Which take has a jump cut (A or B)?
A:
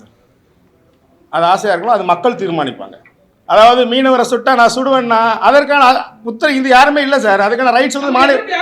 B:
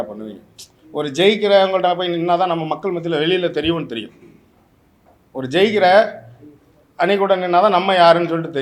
A